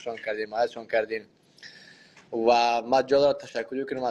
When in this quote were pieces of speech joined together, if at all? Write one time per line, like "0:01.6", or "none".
none